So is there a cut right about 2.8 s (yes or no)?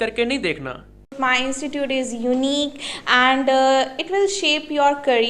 no